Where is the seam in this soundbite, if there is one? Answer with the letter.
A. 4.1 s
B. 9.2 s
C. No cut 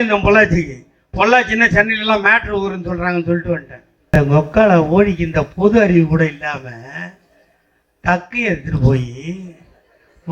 A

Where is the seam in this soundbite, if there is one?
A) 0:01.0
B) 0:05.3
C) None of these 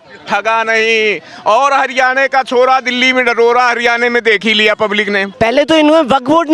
B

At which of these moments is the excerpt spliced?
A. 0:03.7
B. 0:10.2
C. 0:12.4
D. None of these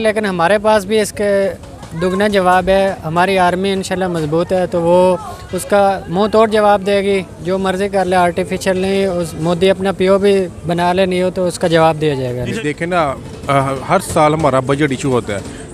C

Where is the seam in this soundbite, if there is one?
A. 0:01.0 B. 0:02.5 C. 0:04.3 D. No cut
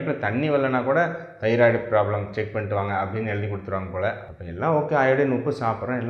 C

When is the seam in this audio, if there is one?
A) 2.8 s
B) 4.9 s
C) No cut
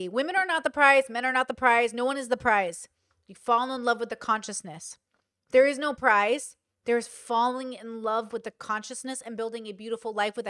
C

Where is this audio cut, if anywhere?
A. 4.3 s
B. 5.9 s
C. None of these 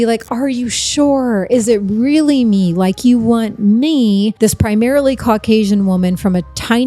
A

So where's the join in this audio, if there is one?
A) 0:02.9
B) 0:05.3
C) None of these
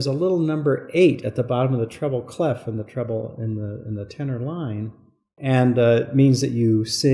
B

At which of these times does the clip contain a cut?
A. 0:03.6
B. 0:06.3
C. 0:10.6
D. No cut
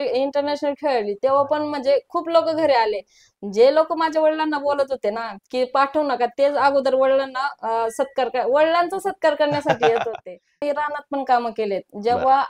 C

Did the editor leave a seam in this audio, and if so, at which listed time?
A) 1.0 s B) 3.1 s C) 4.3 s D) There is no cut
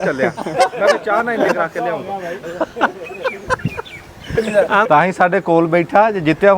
C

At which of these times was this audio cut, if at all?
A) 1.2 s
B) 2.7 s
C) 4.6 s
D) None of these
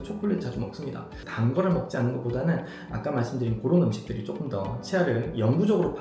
A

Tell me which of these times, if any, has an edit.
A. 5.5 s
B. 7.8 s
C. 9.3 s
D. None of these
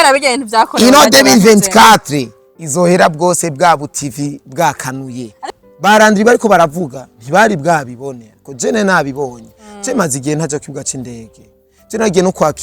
A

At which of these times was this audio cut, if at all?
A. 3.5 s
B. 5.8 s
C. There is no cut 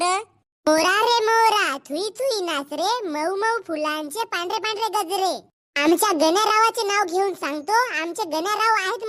C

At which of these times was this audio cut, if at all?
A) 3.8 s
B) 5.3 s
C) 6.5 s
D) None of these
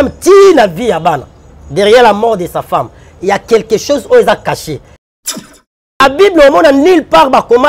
B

